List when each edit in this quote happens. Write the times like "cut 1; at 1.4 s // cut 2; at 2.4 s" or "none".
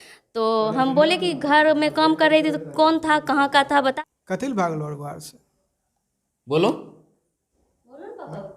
cut 1; at 3.9 s